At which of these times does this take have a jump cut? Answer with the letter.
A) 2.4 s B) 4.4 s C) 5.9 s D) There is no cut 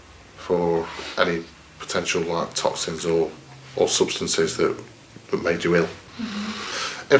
B